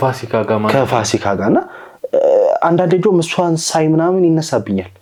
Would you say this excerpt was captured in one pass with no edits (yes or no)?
yes